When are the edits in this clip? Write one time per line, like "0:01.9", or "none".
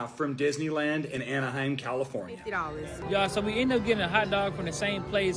0:02.6